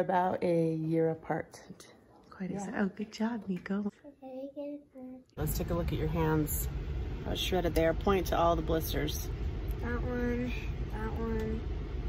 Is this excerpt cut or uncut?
cut